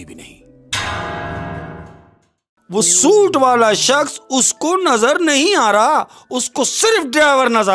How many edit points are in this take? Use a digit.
1